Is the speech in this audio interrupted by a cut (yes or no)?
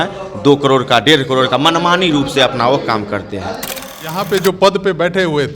yes